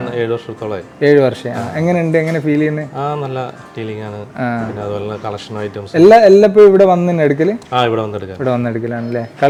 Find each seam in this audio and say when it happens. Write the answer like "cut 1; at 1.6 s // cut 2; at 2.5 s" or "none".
none